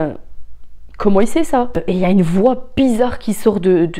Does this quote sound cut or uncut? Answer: cut